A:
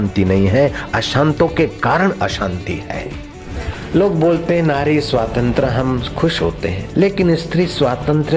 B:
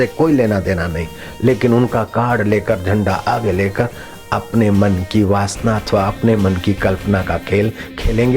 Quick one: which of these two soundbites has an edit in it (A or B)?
A